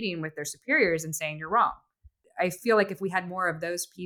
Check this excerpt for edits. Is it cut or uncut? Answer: cut